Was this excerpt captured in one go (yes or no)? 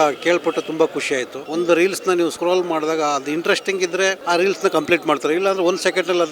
no